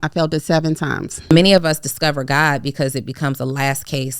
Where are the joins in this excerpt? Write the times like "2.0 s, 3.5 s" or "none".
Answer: 1.3 s